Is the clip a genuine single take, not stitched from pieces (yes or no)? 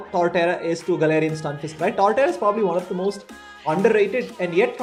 yes